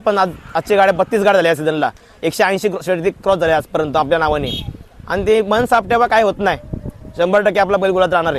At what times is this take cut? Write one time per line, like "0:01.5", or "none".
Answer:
none